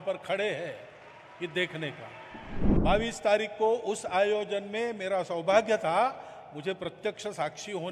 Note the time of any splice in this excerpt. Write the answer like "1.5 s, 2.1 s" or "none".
2.6 s